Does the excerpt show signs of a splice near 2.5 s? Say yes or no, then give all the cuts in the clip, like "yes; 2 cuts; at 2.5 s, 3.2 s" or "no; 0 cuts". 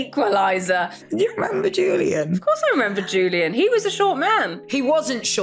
no; 2 cuts; at 1.1 s, 4.6 s